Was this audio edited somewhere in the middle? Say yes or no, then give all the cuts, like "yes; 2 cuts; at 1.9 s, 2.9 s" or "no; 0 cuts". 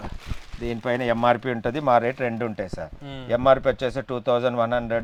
no; 0 cuts